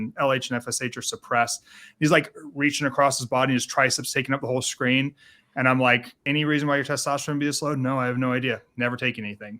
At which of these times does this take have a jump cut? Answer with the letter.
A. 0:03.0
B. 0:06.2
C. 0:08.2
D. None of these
B